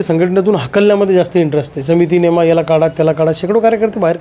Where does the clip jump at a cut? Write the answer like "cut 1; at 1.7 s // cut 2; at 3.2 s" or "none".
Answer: none

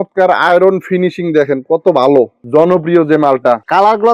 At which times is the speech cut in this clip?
cut 1; at 2.4 s

